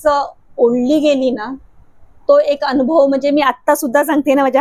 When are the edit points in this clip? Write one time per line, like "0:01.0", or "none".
none